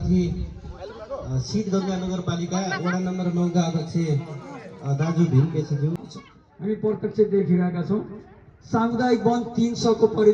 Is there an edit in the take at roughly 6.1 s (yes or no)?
yes